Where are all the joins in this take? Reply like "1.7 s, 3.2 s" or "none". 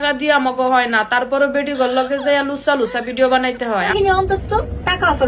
3.9 s